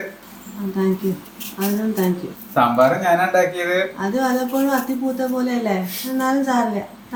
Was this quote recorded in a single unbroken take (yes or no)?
yes